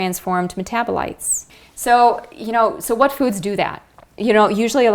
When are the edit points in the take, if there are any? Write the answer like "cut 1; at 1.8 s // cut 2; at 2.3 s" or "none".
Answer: none

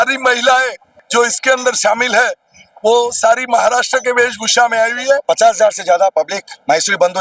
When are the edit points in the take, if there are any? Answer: cut 1; at 0.9 s // cut 2; at 5.2 s

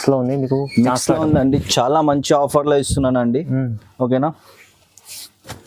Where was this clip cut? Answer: none

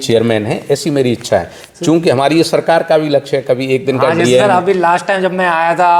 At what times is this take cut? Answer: none

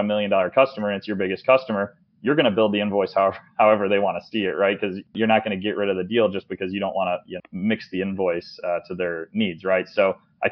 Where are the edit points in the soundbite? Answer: cut 1; at 5.1 s

